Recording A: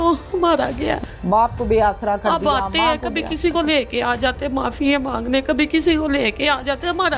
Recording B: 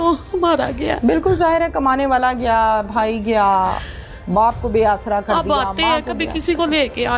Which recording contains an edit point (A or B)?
A